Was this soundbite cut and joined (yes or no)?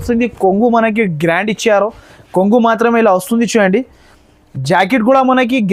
no